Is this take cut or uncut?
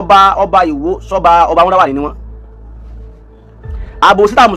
uncut